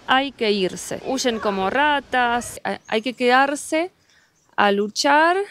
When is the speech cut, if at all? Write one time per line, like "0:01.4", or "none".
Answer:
0:01.0
0:02.6

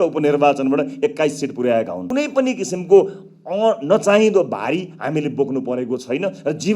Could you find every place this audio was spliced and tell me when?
0:02.0

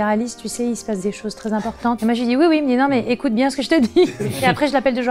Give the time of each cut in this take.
none

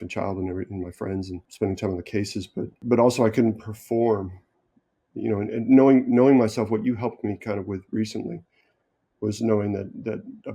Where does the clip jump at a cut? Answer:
0:01.4
0:02.8

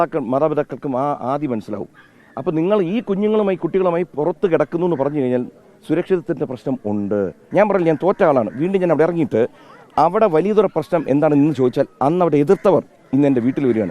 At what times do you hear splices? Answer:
0:07.4

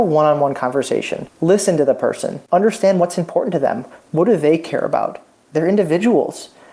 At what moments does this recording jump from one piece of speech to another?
0:01.2
0:02.3

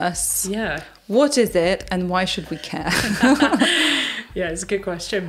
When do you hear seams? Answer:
none

